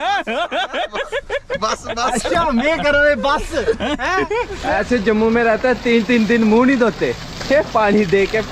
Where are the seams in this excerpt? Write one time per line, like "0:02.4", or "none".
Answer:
0:04.6